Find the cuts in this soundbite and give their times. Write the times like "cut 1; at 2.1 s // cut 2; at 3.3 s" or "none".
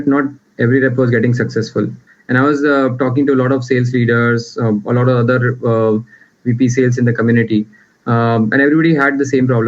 cut 1; at 2.0 s